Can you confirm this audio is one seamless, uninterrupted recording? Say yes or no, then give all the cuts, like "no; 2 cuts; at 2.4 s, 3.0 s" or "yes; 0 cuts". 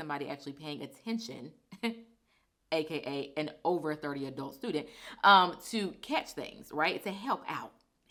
yes; 0 cuts